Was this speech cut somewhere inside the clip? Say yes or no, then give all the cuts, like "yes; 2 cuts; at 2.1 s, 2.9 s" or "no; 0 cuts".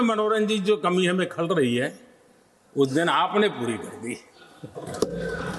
no; 0 cuts